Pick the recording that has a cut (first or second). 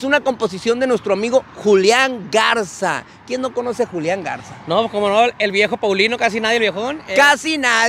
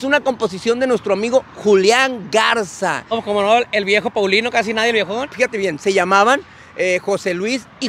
second